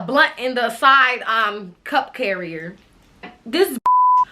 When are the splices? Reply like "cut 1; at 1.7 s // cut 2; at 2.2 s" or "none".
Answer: cut 1; at 3.4 s